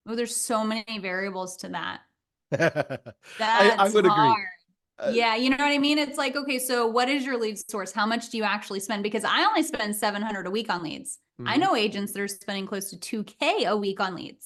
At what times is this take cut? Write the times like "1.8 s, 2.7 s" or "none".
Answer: none